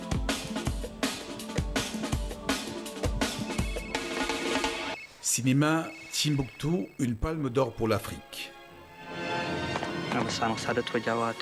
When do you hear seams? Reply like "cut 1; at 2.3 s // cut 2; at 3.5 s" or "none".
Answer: cut 1; at 2.1 s

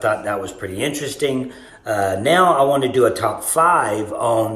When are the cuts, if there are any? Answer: cut 1; at 1.7 s

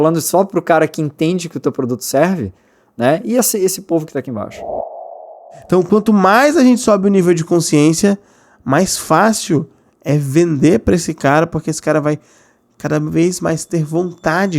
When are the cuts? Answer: cut 1; at 5.1 s

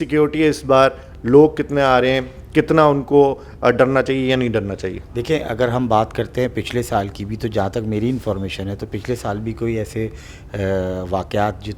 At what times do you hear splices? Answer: none

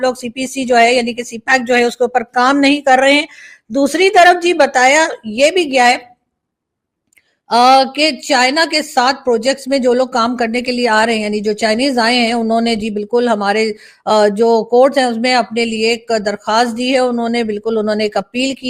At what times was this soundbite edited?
none

